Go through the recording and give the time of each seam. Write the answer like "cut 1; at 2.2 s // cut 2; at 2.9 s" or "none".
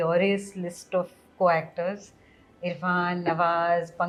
none

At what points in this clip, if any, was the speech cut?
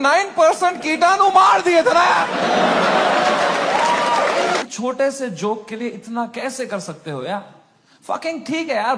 cut 1; at 4.5 s

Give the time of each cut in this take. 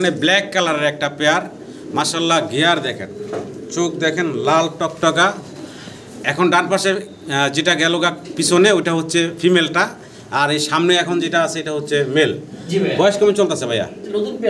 none

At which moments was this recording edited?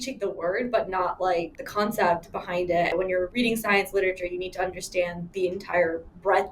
cut 1; at 1.6 s // cut 2; at 3.0 s // cut 3; at 5.2 s

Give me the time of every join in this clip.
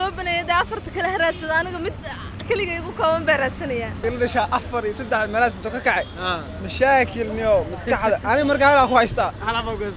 cut 1; at 4.0 s

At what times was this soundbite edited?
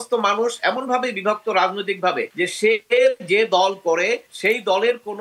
cut 1; at 2.3 s // cut 2; at 4.3 s

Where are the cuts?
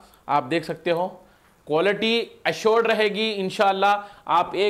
none

